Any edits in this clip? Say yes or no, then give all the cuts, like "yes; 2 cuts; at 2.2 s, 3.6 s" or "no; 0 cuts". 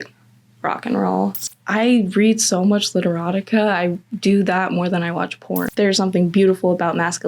yes; 2 cuts; at 1.4 s, 5.6 s